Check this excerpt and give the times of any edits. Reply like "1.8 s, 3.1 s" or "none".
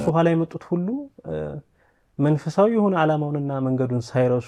none

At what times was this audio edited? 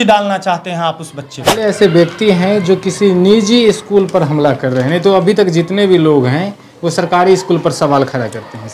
1.6 s

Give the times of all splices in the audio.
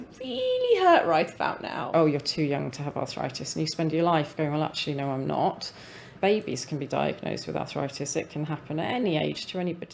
1.9 s, 6.1 s, 9.0 s

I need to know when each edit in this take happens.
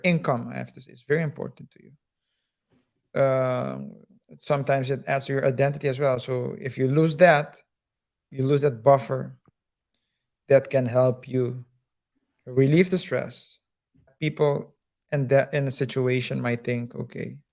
8.3 s, 14.1 s

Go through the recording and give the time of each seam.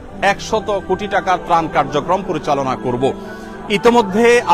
none

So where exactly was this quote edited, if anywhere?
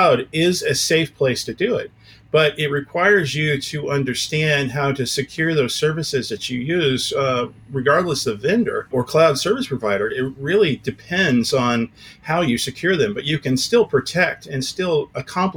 none

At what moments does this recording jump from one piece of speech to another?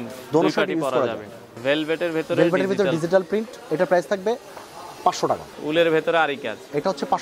1.5 s, 5.5 s

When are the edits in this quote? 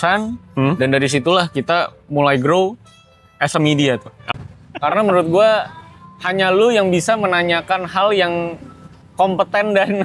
4.2 s

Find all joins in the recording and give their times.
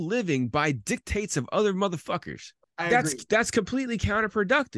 2.7 s

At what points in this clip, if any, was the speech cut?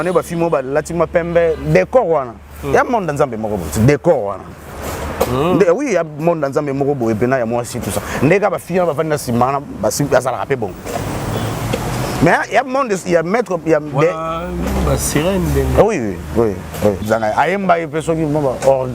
17.0 s

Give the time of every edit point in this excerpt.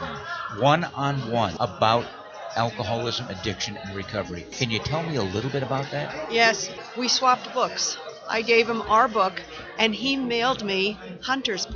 1.5 s, 4.5 s, 6.7 s

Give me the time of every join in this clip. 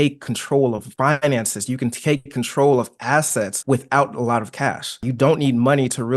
0.9 s, 3.6 s, 5.1 s

